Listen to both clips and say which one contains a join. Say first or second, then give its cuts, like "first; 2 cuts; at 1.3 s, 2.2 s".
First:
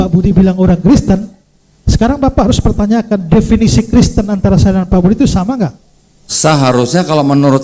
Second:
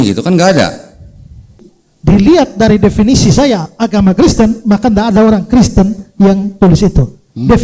second; 1 cut; at 1.7 s